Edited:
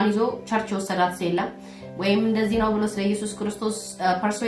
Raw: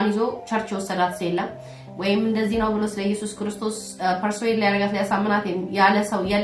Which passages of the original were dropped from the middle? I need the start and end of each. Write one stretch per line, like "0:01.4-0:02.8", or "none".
none